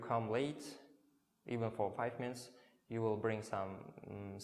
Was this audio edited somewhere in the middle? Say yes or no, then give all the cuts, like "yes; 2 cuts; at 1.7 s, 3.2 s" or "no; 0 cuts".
no; 0 cuts